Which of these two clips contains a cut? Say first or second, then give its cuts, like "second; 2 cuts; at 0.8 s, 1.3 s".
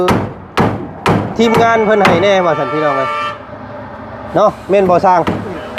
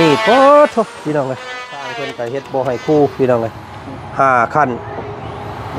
second; 1 cut; at 2.0 s